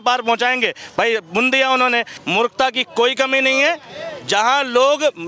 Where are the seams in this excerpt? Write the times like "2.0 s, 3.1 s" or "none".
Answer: 2.2 s

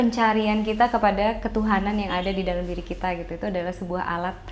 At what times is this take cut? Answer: none

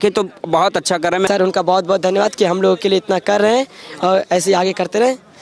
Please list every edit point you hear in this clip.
1.3 s

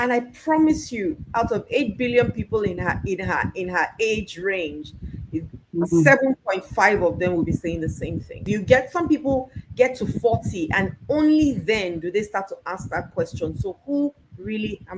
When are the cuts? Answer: 8.4 s

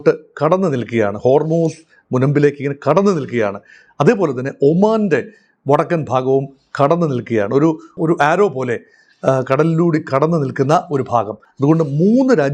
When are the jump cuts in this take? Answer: 11.4 s

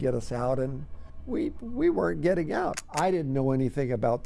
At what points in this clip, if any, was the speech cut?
2.8 s

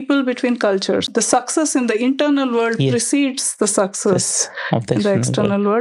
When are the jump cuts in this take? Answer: 1.1 s

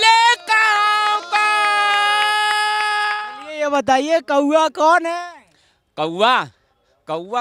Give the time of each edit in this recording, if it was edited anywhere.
none

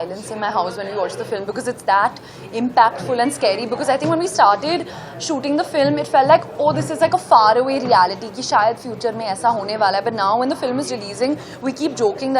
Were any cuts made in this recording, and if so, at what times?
none

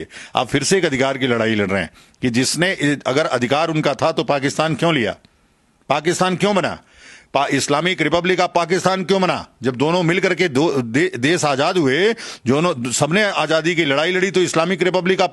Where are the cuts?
none

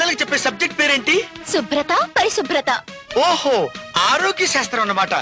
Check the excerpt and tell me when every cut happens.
none

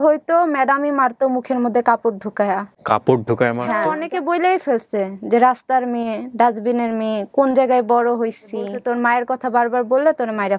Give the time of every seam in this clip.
4.0 s, 8.8 s

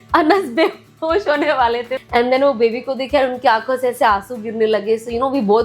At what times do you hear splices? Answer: 1.9 s

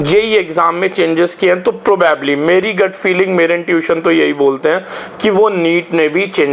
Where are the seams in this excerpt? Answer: none

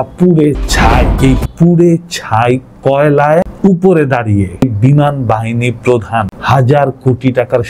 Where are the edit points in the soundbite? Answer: 1.1 s, 3.5 s, 4.6 s, 6.4 s

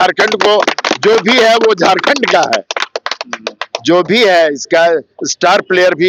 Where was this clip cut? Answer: none

